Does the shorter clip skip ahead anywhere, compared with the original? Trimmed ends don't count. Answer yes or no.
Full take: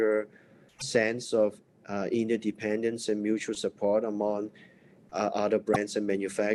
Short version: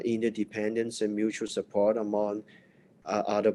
no